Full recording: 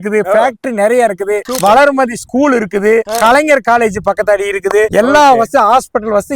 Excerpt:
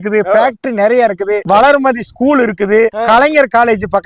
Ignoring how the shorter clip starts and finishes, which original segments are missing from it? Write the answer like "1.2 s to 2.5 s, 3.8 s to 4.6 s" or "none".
1.4 s to 1.6 s